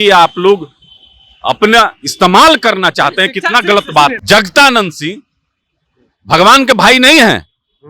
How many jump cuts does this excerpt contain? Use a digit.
1